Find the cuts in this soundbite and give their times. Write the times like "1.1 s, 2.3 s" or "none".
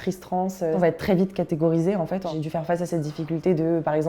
0.7 s, 2.3 s